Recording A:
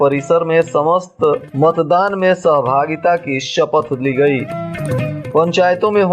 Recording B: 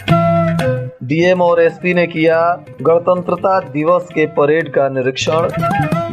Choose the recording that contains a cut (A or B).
B